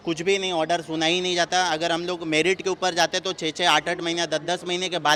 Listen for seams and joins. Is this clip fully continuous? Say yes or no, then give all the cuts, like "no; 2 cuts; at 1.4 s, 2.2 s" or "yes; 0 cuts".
yes; 0 cuts